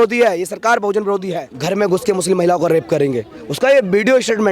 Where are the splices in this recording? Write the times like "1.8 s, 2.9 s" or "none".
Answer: 1.5 s